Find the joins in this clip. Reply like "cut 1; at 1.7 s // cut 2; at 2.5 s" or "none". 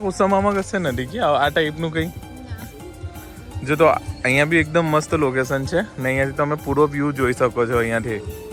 none